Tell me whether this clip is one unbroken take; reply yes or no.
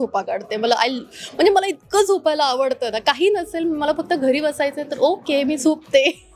yes